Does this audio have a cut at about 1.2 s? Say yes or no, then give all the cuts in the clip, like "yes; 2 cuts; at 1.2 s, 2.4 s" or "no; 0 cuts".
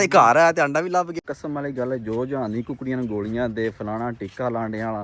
yes; 1 cut; at 1.2 s